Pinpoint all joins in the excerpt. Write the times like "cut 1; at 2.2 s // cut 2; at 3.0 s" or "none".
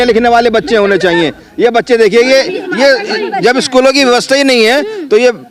none

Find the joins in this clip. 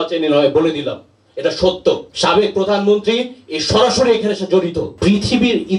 cut 1; at 2.1 s // cut 2; at 4.9 s

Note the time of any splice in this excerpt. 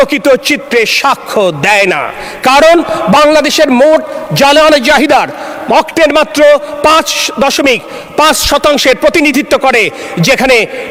none

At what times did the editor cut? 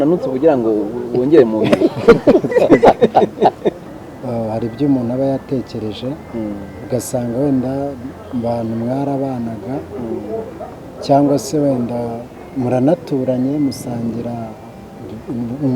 cut 1; at 3.8 s

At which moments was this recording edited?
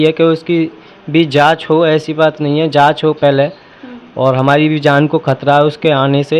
none

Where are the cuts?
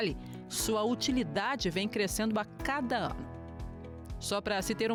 none

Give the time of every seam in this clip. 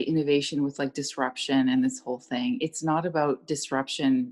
none

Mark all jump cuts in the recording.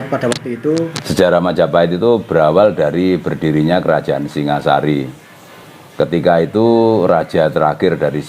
cut 1; at 1.0 s

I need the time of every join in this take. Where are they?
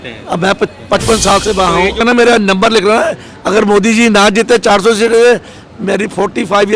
cut 1; at 2.0 s

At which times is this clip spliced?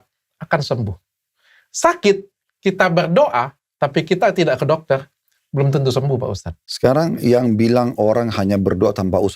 cut 1; at 6.8 s

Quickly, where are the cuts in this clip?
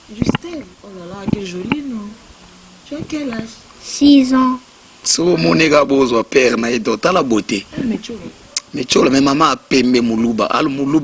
cut 1; at 5.1 s

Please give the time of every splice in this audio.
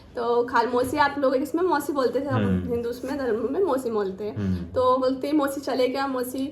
none

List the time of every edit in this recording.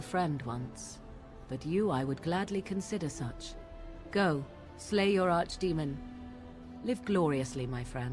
none

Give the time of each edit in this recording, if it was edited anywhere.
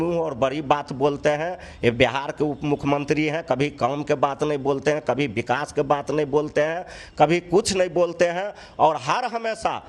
none

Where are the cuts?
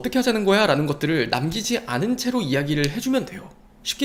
none

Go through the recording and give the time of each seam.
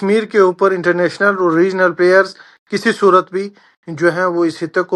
none

